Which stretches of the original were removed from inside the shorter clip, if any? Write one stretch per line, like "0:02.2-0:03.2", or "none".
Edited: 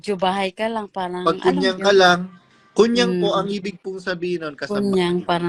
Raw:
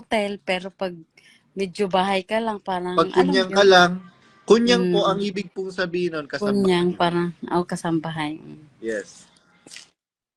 none